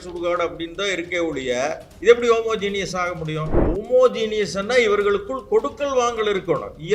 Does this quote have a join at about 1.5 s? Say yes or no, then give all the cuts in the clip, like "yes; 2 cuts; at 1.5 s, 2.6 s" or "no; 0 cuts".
no; 1 cut; at 3.5 s